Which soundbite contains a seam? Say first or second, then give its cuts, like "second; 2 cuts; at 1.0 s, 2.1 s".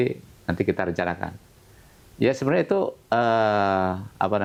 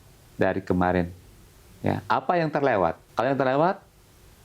second; 1 cut; at 3.0 s